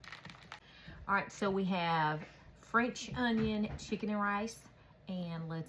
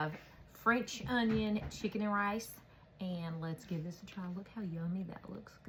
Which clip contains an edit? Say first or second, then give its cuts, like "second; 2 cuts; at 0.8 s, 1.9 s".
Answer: first; 1 cut; at 0.9 s